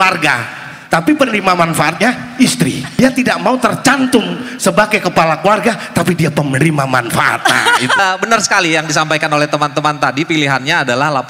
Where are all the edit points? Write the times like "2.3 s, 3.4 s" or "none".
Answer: 2.8 s, 8.0 s